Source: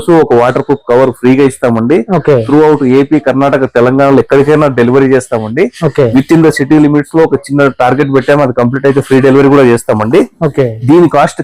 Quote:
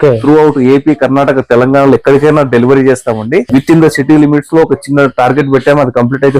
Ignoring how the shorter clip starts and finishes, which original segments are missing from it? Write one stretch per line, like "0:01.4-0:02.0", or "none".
0:05.7-0:06.1

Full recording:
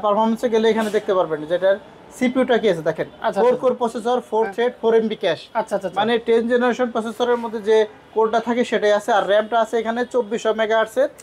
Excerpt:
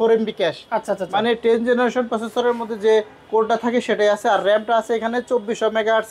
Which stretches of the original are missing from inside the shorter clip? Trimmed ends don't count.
none

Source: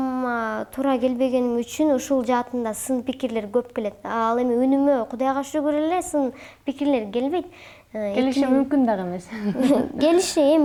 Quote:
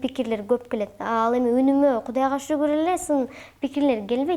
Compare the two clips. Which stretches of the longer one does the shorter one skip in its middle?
none

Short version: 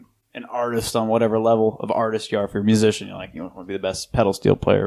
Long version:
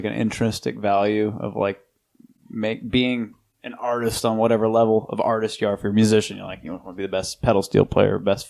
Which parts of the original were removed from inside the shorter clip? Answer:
none

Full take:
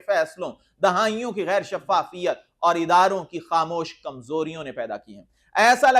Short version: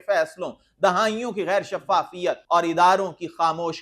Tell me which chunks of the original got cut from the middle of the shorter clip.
0:02.4-0:02.5

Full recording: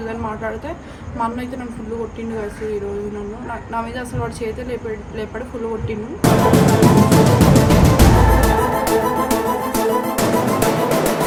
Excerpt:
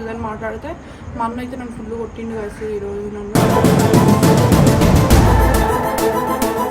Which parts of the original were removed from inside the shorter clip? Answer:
0:03.3-0:06.2

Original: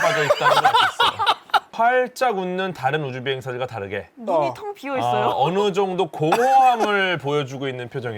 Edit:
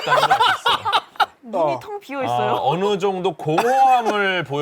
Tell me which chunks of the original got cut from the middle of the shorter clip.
0:01.7-0:04.1

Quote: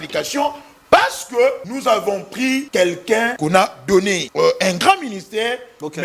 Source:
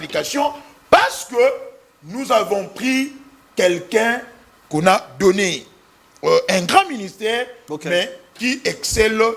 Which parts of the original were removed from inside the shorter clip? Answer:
0:02.2-0:03.1
0:04.2-0:04.7
0:05.6-0:06.1

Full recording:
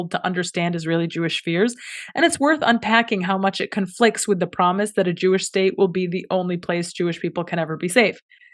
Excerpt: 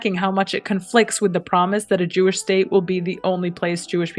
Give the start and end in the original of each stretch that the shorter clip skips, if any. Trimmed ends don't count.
none

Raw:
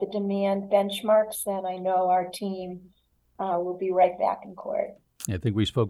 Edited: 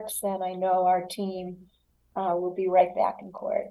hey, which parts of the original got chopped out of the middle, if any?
none

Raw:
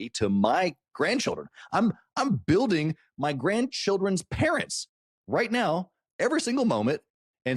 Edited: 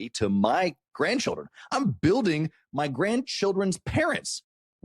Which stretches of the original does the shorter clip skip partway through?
0:01.6-0:02.0

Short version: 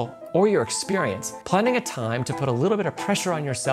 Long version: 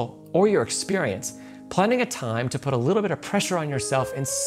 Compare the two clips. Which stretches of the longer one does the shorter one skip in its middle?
0:01.3-0:01.6

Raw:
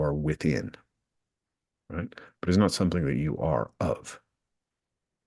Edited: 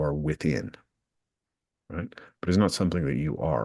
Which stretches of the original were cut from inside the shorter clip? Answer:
none

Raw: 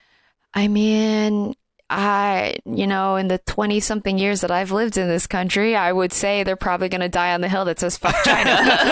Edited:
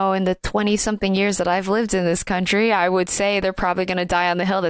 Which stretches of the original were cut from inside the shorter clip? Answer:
none

